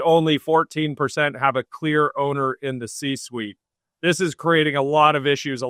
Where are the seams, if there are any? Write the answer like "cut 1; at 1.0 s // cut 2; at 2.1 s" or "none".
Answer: none

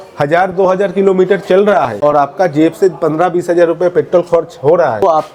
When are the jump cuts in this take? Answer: none

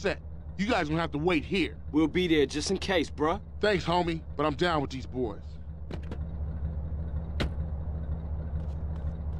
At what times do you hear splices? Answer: none

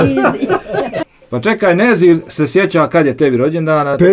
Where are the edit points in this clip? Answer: cut 1; at 1.0 s

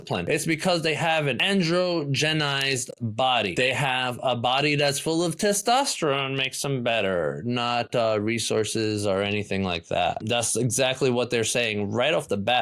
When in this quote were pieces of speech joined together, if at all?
cut 1; at 10.2 s

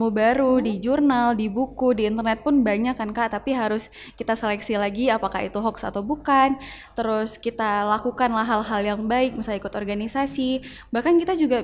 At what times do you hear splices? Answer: none

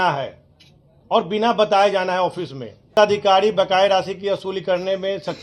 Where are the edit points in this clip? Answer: cut 1; at 2.9 s

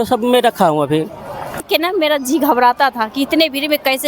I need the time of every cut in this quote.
cut 1; at 1.7 s

